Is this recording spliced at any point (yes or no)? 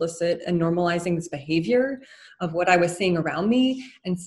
no